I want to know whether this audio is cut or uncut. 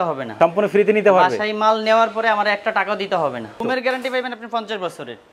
cut